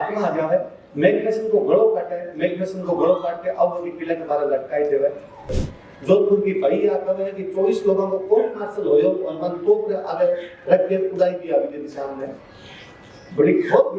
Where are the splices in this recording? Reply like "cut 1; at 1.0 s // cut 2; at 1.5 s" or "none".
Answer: cut 1; at 5.5 s